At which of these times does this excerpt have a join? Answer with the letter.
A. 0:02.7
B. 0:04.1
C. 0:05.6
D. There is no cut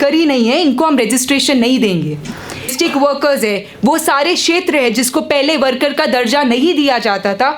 A